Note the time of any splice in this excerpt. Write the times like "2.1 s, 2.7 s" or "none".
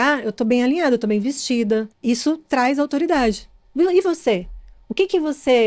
1.9 s